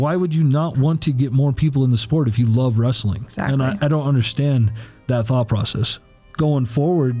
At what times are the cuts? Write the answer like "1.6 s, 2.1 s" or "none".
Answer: 5.9 s